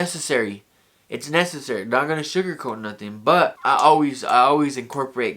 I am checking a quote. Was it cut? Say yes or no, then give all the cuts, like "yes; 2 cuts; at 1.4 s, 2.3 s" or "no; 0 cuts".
yes; 1 cut; at 3.6 s